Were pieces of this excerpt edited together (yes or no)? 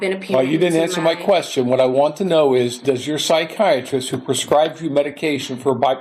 no